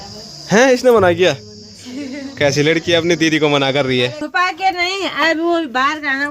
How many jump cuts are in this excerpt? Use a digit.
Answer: 1